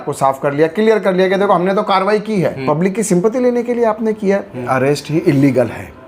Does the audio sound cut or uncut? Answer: cut